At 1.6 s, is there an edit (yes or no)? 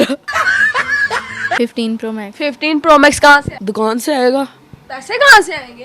yes